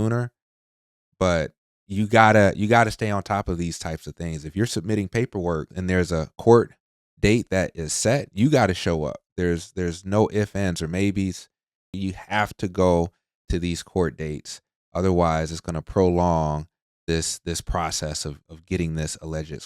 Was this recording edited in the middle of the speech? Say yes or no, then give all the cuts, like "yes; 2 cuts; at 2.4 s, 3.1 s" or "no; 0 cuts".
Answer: yes; 1 cut; at 11.9 s